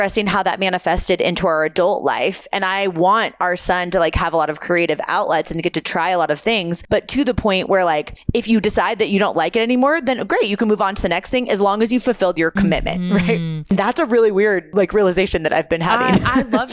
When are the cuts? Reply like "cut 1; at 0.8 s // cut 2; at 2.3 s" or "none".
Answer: cut 1; at 6.8 s // cut 2; at 8.2 s // cut 3; at 13.7 s // cut 4; at 14.7 s

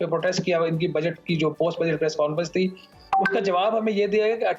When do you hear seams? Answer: none

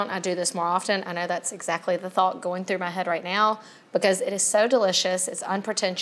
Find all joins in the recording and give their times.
none

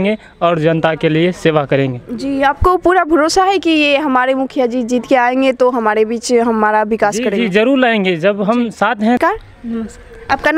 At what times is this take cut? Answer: none

